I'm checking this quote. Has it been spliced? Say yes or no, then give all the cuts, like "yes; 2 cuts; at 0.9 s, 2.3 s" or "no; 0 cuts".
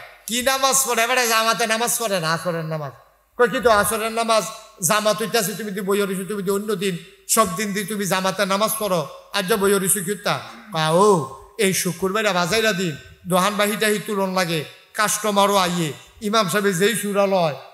no; 0 cuts